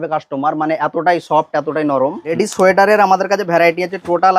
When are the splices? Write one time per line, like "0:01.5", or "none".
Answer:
0:02.4

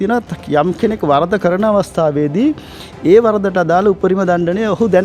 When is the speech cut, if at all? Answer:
none

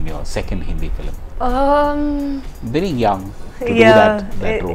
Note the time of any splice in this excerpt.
0:01.2

